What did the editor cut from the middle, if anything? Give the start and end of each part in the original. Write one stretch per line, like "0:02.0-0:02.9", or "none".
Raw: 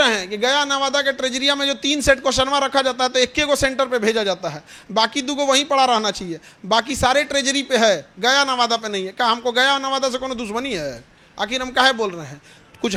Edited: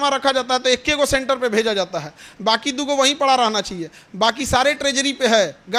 none